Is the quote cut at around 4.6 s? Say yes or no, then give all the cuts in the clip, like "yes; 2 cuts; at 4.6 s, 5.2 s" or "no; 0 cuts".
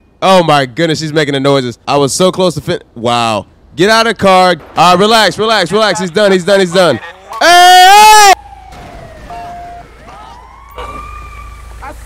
yes; 3 cuts; at 1.8 s, 4.6 s, 8.3 s